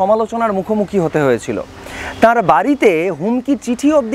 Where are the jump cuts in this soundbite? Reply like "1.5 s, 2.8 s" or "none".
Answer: none